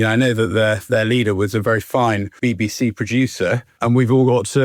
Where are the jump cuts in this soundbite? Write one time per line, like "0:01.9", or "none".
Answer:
none